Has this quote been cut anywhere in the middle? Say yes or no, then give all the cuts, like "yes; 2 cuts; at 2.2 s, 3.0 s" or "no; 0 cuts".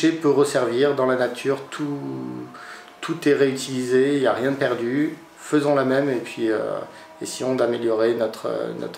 no; 0 cuts